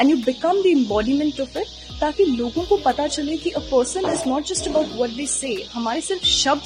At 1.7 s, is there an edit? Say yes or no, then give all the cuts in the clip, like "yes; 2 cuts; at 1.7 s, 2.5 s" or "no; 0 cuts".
no; 0 cuts